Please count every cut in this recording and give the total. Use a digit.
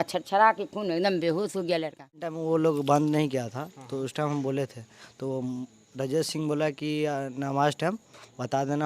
1